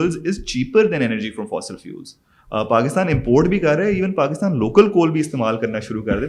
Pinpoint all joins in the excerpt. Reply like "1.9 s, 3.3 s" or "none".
none

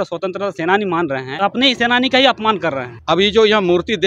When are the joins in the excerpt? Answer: 1.3 s, 2.9 s

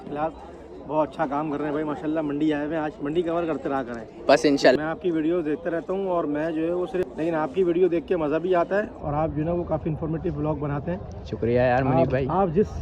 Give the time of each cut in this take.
4.8 s, 7.0 s

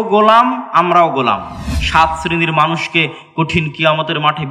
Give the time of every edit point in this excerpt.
1.7 s

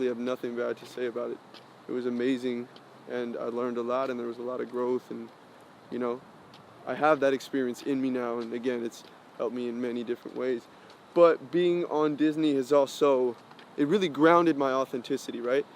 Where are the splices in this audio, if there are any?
none

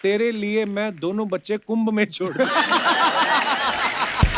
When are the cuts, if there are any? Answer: none

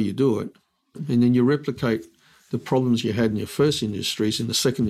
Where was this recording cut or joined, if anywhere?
1.0 s

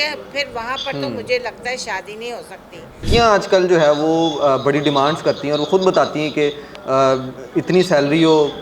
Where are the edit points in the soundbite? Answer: 3.1 s

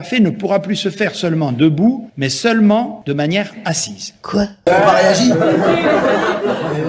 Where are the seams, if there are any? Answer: 4.7 s

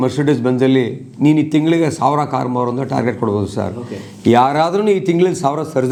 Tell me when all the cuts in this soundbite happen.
none

